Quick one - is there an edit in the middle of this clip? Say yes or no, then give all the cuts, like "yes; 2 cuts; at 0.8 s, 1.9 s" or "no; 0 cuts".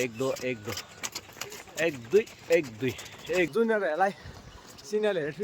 yes; 1 cut; at 3.5 s